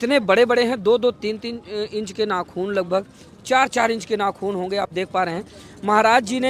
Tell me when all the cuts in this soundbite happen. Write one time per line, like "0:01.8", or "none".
none